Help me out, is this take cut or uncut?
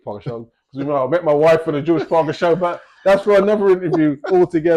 uncut